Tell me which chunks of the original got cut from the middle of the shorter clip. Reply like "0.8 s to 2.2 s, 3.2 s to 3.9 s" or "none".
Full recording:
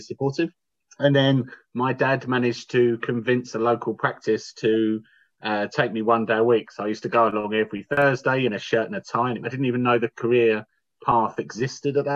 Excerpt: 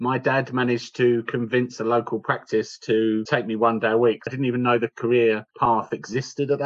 5.0 s to 5.7 s, 6.7 s to 9.5 s, 10.7 s to 10.9 s